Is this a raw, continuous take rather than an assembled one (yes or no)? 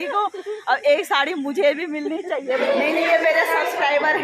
no